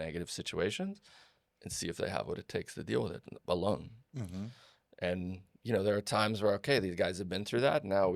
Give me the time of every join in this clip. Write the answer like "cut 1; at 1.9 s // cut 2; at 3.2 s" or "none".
none